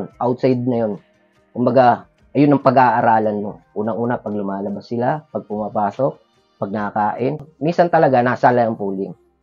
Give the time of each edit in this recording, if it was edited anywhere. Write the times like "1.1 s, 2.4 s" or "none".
7.4 s